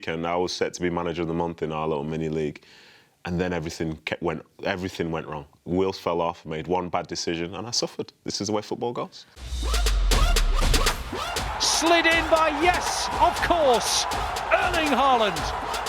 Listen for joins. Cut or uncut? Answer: cut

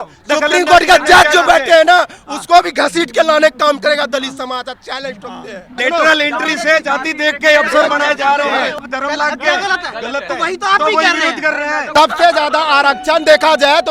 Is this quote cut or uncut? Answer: cut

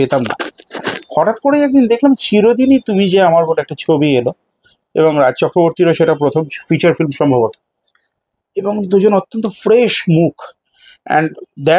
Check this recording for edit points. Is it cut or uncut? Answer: uncut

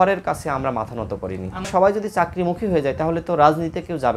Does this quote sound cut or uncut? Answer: cut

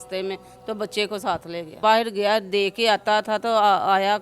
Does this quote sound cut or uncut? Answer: cut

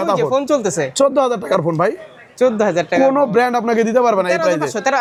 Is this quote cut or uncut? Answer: uncut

